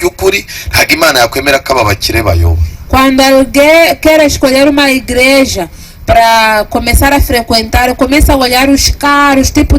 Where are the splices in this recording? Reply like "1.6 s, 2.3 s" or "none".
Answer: none